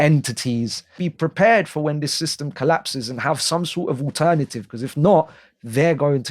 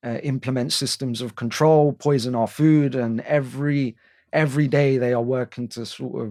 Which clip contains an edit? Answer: first; 1 cut; at 0.9 s

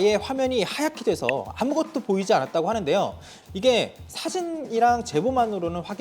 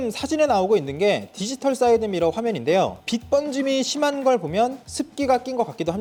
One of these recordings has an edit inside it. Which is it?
first; 1 cut; at 3.2 s

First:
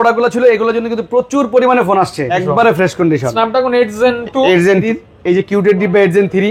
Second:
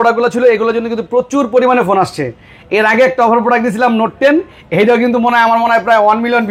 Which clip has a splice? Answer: first; 2 cuts; at 2.4 s, 4.8 s

